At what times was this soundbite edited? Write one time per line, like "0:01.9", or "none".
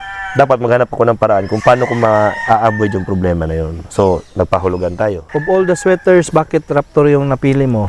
0:05.3

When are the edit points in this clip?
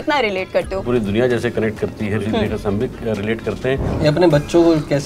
0:00.9
0:02.2
0:03.9

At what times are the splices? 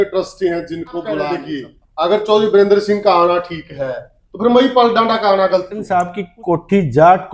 0:01.4
0:05.7

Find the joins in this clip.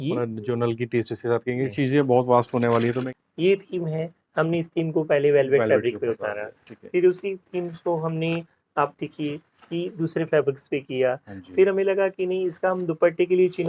0:01.7
0:03.1

